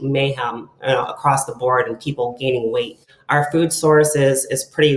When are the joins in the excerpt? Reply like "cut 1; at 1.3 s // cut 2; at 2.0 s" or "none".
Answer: cut 1; at 3.1 s